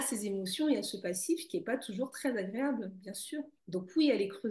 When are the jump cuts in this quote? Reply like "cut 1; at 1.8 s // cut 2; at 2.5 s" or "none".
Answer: cut 1; at 3.6 s